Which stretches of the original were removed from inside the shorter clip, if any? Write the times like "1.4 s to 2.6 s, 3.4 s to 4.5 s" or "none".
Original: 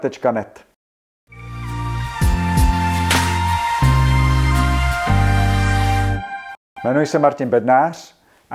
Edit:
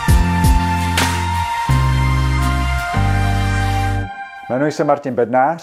6.4 s to 6.6 s